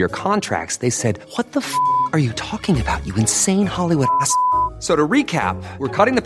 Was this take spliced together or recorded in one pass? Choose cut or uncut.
uncut